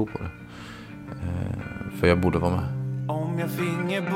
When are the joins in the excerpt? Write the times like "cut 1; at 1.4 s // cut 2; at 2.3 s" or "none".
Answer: cut 1; at 2.9 s

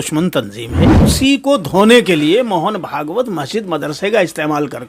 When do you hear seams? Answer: cut 1; at 1.0 s

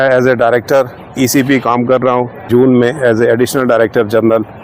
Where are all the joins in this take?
cut 1; at 1.0 s // cut 2; at 2.5 s

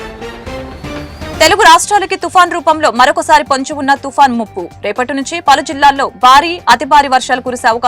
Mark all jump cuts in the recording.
cut 1; at 1.4 s

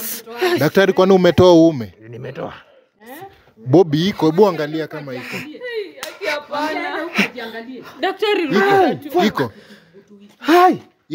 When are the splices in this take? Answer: none

